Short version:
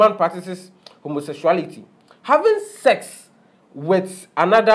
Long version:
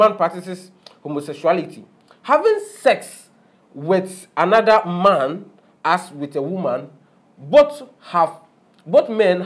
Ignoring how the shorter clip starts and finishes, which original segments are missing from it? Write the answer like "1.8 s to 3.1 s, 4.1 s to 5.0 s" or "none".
none